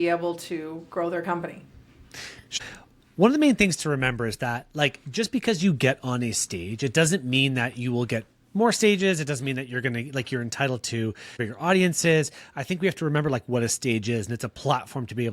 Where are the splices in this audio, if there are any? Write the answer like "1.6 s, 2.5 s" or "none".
2.6 s, 11.5 s